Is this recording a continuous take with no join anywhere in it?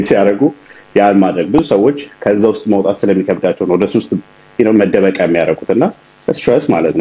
yes; 0 cuts

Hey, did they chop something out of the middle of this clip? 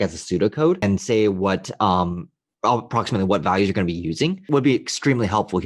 yes; 2 cuts; at 0.8 s, 4.5 s

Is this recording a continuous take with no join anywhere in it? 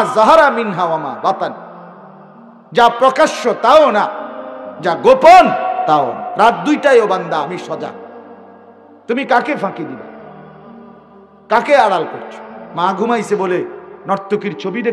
no; 2 cuts; at 10.0 s, 11.4 s

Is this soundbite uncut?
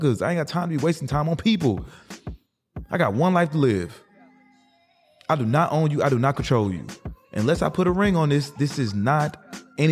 yes; 0 cuts

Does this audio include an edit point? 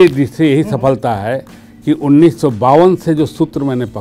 no; 0 cuts

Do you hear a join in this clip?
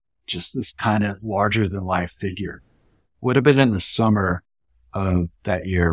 yes; 1 cut; at 2.8 s

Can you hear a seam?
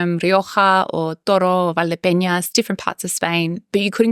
no; 0 cuts

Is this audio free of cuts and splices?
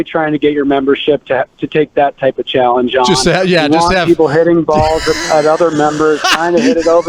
yes; 0 cuts

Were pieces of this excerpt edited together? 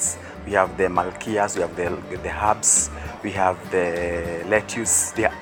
no; 0 cuts

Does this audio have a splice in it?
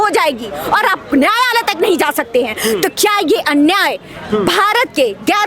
no; 0 cuts

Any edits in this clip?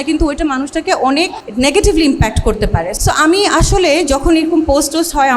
yes; 2 cuts; at 1.4 s, 2.9 s

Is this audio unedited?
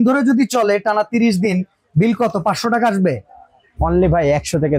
yes; 0 cuts

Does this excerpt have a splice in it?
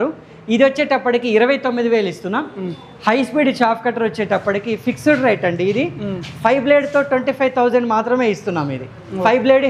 no; 0 cuts

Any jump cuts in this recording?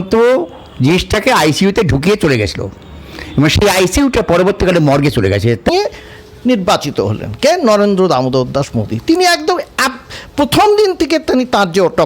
yes; 1 cut; at 5.7 s

